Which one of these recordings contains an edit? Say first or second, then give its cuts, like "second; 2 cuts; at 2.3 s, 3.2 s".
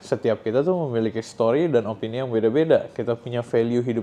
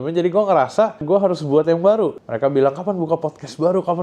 second; 2 cuts; at 1.0 s, 2.2 s